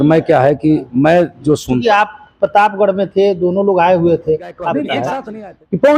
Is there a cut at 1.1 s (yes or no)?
no